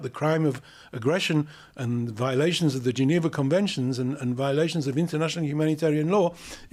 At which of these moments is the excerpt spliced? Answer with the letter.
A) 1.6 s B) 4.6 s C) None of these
C